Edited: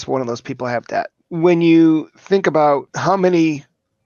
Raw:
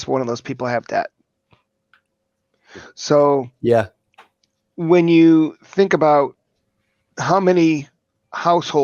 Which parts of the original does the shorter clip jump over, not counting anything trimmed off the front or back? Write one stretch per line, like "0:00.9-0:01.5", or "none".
0:01.2-0:04.7
0:06.4-0:07.1